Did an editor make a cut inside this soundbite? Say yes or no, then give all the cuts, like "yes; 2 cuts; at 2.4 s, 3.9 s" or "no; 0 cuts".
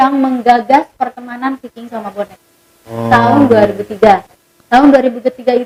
no; 0 cuts